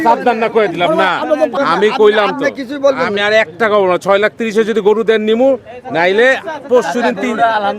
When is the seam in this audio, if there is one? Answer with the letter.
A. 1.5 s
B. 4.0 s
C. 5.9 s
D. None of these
A